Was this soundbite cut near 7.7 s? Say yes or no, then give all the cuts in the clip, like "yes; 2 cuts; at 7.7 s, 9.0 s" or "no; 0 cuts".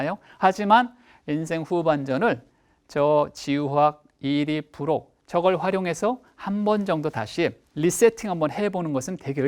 yes; 1 cut; at 7.7 s